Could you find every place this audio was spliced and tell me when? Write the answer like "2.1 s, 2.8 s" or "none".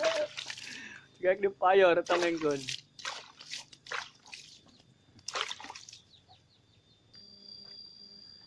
7.1 s